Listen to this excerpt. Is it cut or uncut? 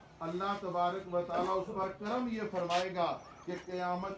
uncut